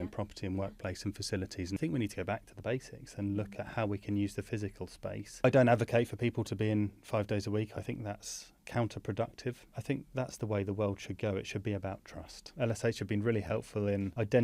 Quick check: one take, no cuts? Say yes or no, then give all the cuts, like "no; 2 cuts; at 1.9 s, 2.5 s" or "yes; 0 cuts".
no; 4 cuts; at 1.8 s, 5.4 s, 9.7 s, 12.4 s